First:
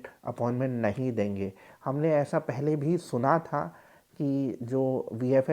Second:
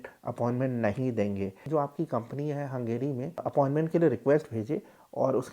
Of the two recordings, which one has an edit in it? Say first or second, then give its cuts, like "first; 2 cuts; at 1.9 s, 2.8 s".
second; 2 cuts; at 1.6 s, 3.4 s